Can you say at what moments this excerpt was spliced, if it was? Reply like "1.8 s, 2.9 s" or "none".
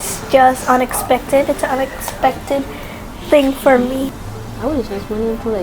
4.2 s